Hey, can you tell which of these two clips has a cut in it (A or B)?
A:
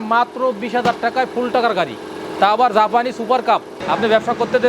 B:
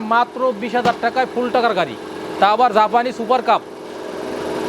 A